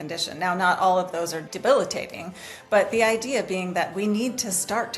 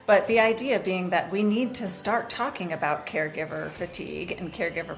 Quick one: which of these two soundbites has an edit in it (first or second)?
first